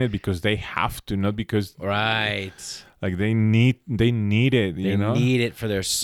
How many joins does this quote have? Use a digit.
0